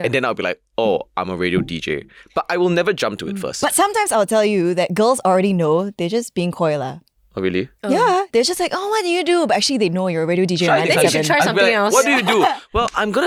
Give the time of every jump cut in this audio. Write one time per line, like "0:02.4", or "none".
none